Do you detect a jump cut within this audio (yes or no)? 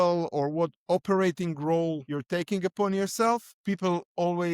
yes